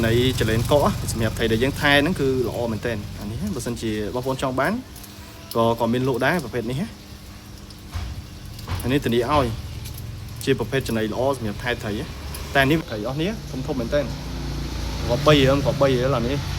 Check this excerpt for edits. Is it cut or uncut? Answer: cut